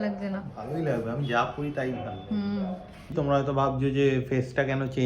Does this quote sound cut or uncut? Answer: cut